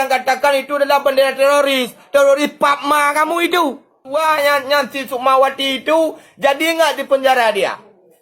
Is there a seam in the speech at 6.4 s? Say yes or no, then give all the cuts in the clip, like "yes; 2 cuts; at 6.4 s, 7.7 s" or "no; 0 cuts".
no; 1 cut; at 4.1 s